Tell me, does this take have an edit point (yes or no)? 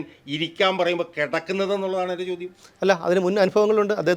no